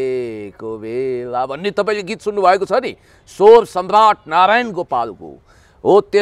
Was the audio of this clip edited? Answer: no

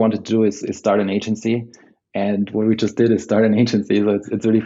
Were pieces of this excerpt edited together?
no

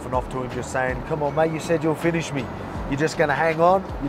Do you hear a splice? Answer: no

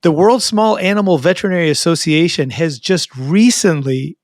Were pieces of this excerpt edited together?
no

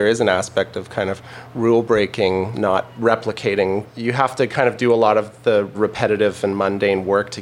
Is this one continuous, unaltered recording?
no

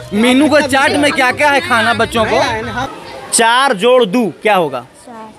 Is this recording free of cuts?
no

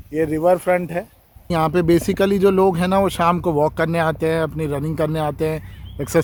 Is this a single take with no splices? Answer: yes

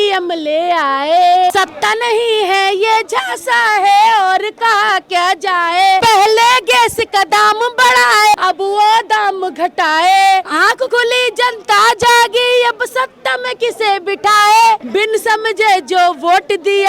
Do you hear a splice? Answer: yes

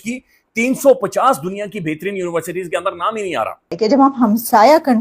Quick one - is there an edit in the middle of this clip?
yes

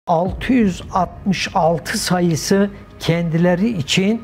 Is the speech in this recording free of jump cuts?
yes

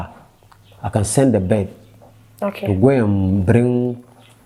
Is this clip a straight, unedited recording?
yes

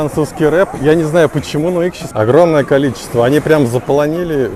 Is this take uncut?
yes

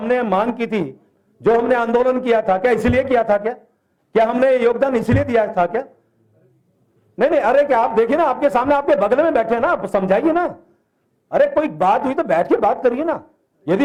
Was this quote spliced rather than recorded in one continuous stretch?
no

